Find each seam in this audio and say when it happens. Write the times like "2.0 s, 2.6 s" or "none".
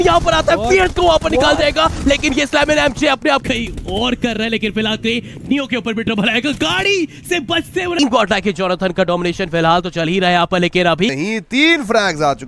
3.4 s, 8.0 s, 11.1 s